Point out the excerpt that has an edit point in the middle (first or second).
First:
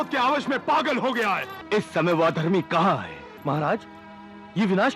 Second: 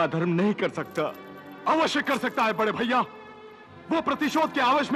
first